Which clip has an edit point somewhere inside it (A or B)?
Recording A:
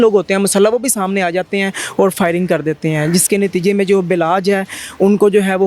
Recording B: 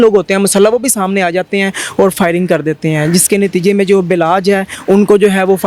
B